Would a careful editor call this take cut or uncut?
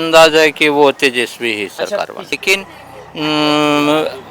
cut